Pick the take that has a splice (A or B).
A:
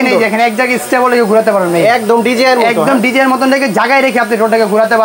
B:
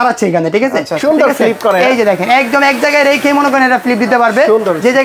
B